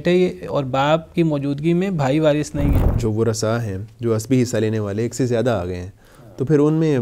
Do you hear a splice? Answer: yes; 1 cut; at 2.9 s

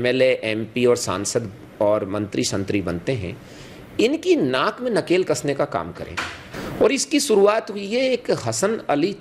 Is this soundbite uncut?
no; 1 cut; at 6.4 s

